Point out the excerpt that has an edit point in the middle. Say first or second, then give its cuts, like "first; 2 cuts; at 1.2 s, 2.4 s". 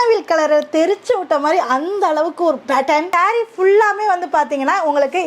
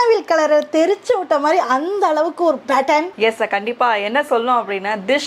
first; 1 cut; at 3.1 s